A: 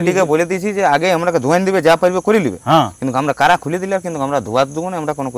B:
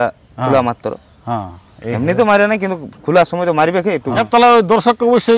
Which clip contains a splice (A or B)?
B